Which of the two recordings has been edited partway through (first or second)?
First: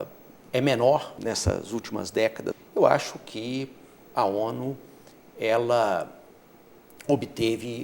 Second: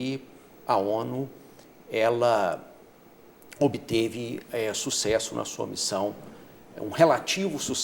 first